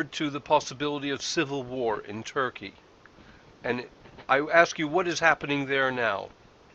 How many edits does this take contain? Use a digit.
0